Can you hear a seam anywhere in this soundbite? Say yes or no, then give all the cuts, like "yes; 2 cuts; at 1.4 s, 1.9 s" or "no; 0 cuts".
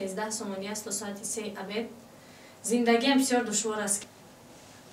yes; 1 cut; at 4.0 s